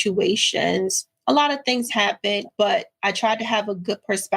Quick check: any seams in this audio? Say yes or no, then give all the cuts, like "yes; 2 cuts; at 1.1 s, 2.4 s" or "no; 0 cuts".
yes; 1 cut; at 2.5 s